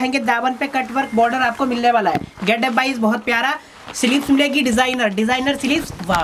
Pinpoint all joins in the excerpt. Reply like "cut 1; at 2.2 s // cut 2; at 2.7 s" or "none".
none